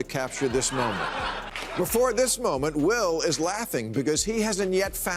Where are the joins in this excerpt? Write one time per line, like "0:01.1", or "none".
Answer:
0:01.6